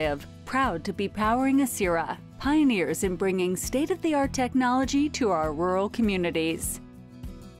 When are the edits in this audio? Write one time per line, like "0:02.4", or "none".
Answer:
0:06.6